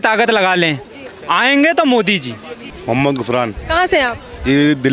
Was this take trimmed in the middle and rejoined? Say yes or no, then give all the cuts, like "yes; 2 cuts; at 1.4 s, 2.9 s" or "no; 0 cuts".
no; 0 cuts